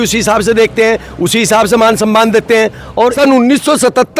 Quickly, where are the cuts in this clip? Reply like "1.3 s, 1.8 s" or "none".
3.1 s